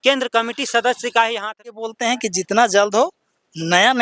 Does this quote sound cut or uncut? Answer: cut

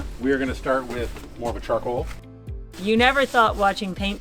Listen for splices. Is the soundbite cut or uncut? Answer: cut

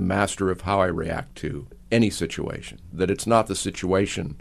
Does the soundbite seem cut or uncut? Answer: cut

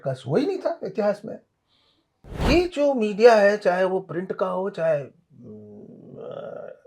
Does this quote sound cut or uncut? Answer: cut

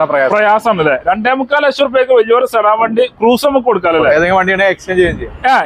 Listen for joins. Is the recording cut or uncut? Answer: cut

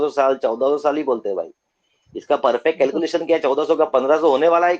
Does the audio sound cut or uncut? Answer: uncut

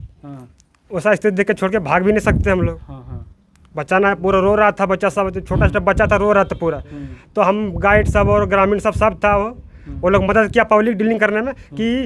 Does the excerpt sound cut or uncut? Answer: uncut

